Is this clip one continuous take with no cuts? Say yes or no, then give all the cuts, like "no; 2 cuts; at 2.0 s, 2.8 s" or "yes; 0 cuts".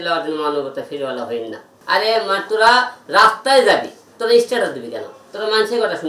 no; 1 cut; at 1.7 s